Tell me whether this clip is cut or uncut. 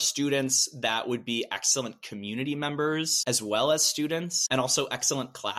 cut